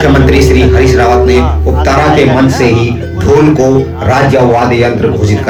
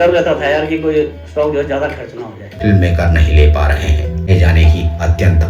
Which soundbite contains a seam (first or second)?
second